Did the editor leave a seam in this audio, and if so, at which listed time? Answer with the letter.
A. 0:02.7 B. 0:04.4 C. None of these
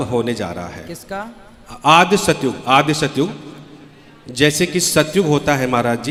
C